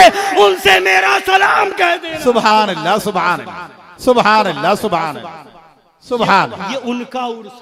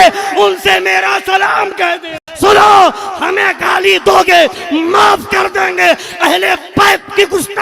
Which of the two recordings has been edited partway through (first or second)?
second